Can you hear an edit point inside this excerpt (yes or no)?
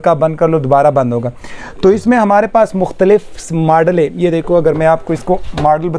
no